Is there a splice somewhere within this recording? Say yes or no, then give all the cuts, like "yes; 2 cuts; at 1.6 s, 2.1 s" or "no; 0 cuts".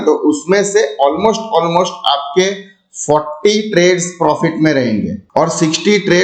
no; 0 cuts